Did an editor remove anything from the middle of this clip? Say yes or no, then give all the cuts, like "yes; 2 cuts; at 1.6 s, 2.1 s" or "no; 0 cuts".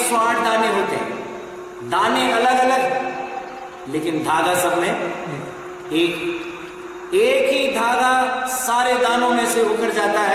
no; 0 cuts